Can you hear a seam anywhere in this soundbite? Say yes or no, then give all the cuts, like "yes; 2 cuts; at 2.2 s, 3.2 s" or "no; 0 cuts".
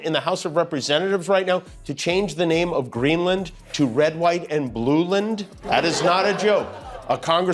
no; 0 cuts